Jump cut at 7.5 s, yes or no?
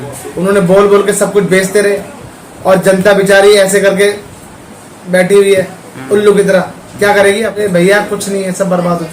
yes